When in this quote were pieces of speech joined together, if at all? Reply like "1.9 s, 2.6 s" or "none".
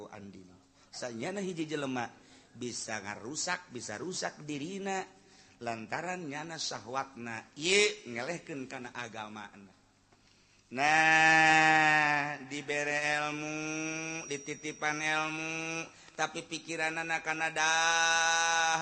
none